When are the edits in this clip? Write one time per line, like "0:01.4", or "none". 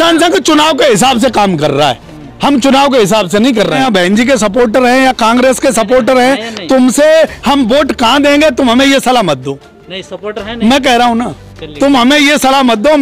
0:03.8